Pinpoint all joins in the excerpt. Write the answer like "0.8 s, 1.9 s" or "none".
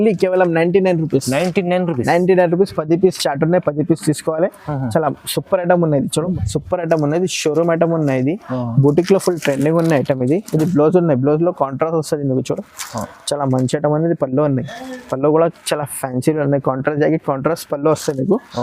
6.4 s